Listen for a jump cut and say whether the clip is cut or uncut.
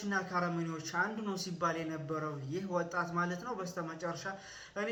uncut